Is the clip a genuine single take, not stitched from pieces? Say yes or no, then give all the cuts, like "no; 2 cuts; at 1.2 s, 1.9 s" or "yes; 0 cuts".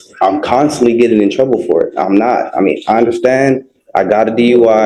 yes; 0 cuts